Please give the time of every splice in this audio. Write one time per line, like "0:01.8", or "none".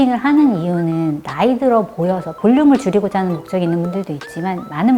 none